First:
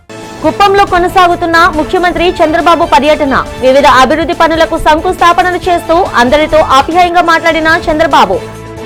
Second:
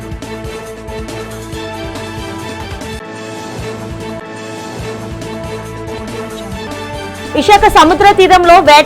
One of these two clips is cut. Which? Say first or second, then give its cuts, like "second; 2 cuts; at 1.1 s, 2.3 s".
second; 1 cut; at 0.9 s